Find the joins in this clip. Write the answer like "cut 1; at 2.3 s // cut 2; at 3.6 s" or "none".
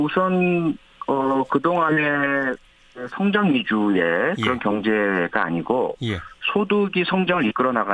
cut 1; at 3.2 s